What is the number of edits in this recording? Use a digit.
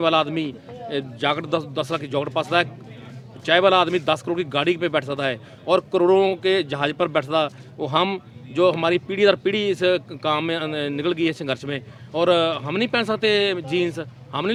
0